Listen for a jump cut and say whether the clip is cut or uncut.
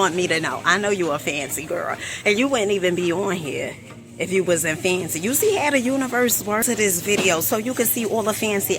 cut